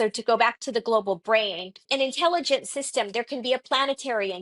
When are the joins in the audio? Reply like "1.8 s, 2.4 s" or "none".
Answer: 1.8 s